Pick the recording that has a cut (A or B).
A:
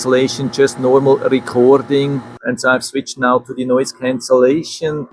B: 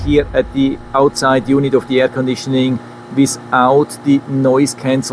A